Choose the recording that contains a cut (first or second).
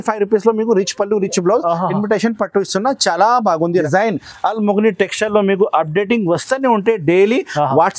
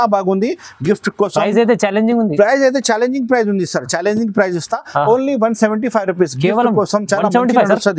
first